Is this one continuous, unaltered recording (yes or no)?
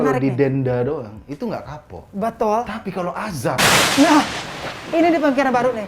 yes